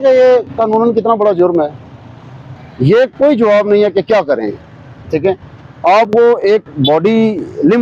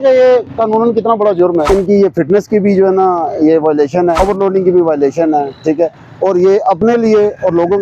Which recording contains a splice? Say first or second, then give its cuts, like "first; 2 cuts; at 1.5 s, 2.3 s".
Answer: second; 2 cuts; at 1.7 s, 4.2 s